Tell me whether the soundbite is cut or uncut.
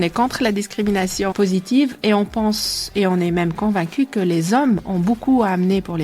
cut